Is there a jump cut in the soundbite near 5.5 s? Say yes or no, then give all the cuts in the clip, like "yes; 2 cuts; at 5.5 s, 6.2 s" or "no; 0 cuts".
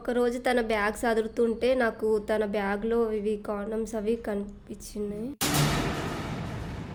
no; 0 cuts